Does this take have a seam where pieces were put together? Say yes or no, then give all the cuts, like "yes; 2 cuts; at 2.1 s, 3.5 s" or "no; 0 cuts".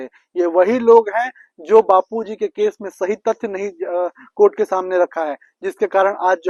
no; 0 cuts